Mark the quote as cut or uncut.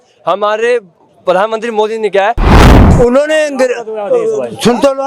cut